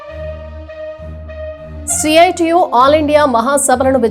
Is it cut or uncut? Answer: cut